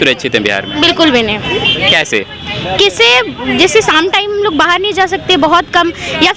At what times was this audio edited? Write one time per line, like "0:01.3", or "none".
none